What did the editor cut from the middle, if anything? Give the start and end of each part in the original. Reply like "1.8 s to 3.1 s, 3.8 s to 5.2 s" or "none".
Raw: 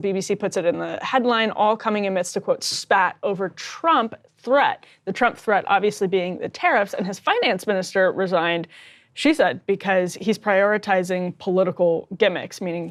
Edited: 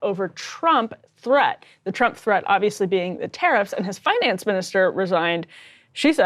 none